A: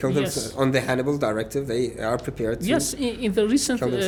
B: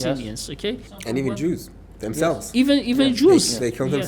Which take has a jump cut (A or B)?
B